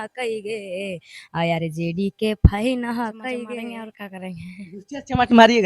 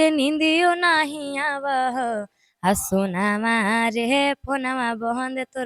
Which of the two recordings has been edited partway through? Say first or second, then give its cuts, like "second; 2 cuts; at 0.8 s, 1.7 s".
first; 1 cut; at 3.5 s